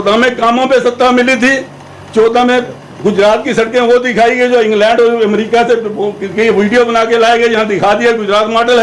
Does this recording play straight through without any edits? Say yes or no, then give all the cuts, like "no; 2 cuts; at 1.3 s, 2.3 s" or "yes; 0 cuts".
yes; 0 cuts